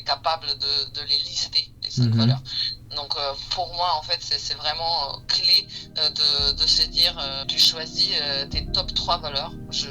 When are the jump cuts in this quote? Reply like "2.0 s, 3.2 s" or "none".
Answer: 7.4 s